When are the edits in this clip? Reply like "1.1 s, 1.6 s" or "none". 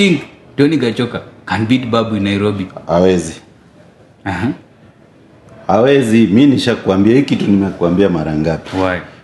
none